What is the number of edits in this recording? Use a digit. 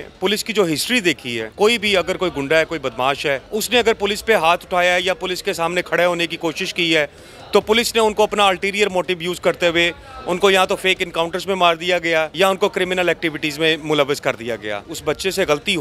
4